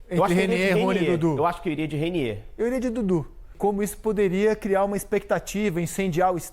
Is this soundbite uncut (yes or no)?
no